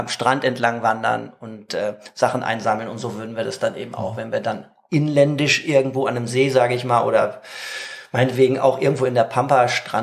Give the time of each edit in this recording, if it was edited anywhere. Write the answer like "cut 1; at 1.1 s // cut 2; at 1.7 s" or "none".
none